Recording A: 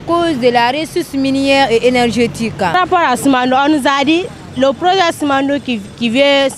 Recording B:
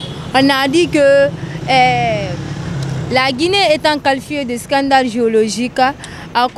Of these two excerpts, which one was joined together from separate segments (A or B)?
A